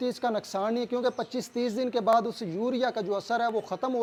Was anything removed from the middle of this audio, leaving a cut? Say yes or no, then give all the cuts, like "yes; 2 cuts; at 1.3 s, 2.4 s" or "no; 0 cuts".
no; 0 cuts